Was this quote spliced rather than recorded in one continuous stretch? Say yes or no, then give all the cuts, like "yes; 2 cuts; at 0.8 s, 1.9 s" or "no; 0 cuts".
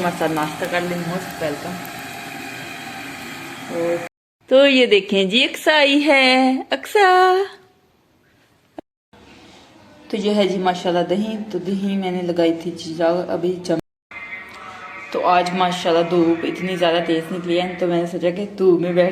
yes; 3 cuts; at 4.1 s, 8.7 s, 13.8 s